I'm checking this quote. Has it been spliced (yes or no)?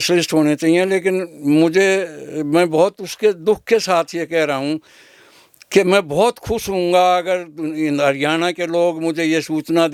no